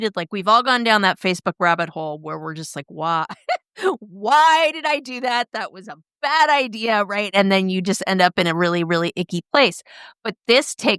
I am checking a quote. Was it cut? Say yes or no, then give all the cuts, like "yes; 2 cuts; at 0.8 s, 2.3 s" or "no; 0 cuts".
no; 0 cuts